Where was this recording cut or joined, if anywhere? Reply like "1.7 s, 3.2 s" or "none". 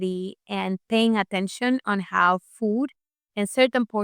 none